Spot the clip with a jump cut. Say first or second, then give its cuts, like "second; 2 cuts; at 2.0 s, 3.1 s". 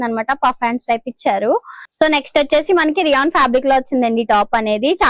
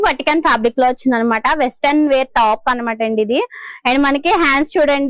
first; 1 cut; at 1.8 s